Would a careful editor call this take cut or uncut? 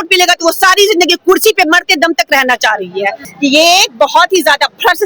cut